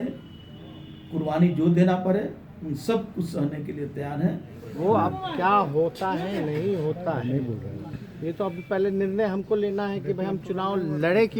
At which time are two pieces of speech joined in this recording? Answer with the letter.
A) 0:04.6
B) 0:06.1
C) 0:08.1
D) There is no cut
A